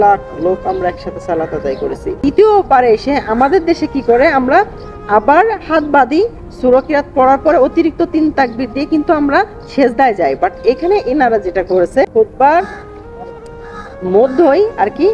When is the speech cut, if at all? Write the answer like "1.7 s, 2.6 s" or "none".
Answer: 2.1 s, 12.1 s